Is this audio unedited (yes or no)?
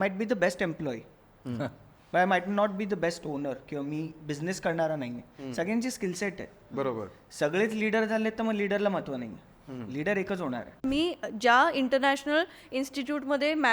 no